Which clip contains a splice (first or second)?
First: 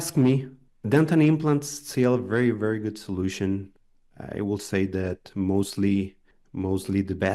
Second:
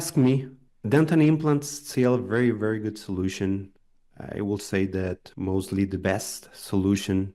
second